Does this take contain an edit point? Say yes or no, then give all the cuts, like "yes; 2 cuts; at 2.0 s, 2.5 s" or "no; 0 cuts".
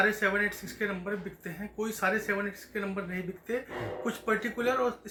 no; 0 cuts